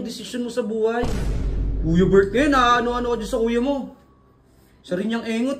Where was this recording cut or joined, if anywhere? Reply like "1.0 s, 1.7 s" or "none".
1.2 s